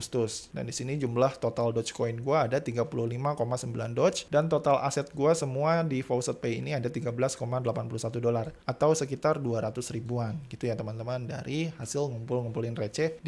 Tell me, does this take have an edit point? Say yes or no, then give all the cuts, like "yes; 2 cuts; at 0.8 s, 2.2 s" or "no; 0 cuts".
no; 0 cuts